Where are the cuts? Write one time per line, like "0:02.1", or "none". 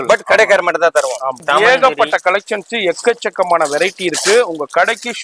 0:01.4